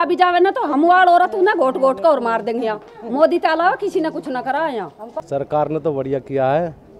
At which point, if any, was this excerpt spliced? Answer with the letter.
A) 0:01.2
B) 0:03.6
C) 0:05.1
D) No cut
C